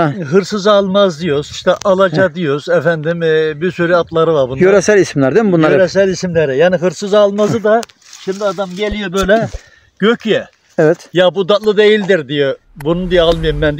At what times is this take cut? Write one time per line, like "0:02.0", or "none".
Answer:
none